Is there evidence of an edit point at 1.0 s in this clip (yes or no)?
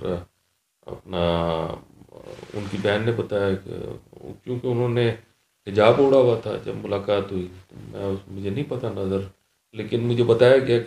no